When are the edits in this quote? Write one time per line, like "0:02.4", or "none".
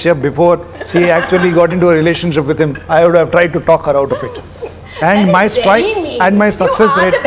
none